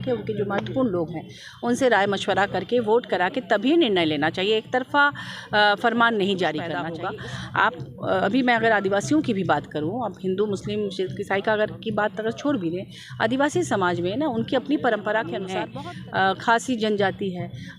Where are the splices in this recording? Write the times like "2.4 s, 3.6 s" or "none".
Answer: 6.9 s, 15.6 s